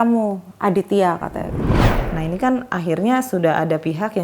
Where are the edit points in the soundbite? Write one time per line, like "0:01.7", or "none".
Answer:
0:01.9